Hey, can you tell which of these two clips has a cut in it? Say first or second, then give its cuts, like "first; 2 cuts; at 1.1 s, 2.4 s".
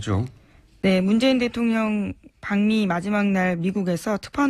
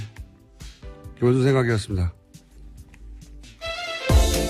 second; 1 cut; at 1.5 s